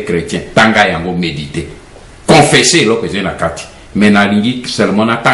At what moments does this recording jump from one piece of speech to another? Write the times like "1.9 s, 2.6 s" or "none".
none